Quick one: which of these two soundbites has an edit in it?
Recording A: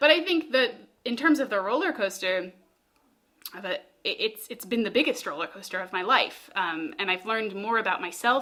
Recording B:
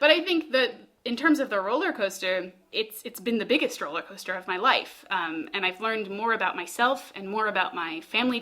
B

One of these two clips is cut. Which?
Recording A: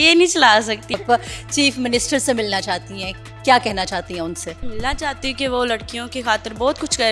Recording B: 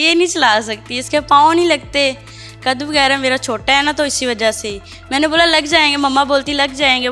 A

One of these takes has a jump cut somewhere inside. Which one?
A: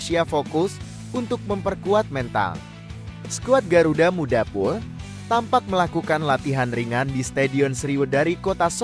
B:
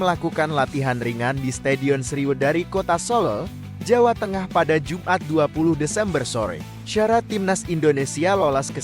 B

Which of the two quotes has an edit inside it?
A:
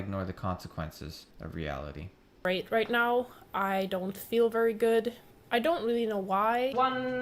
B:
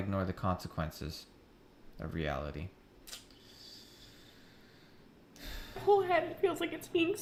A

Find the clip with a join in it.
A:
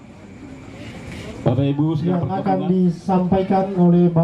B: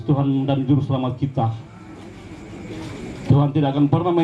A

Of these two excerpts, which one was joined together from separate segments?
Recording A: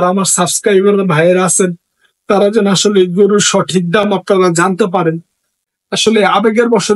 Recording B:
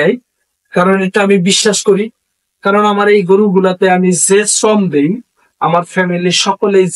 A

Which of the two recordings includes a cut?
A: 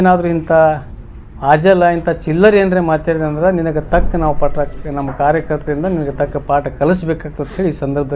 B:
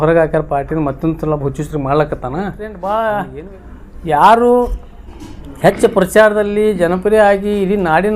B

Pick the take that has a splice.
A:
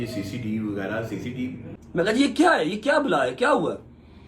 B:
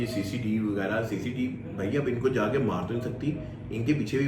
A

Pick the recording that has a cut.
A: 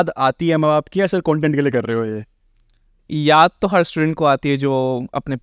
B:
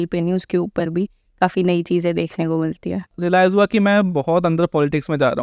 B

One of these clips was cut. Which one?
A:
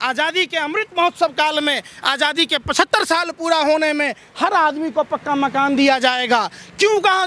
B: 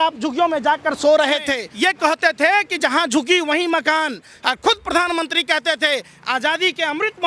B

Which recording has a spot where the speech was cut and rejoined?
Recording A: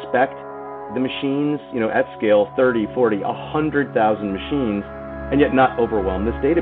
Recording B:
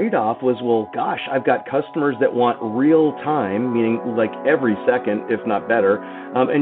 A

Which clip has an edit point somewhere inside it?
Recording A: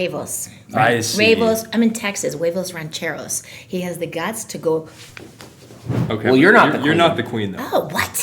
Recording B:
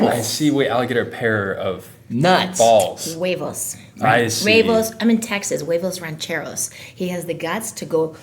A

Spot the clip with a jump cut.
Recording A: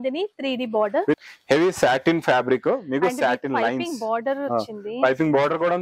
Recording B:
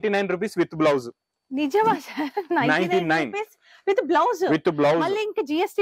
A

